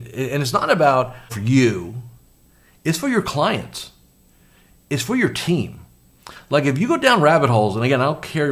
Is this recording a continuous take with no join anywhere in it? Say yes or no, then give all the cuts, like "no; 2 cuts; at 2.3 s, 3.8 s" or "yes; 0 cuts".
no; 1 cut; at 1.4 s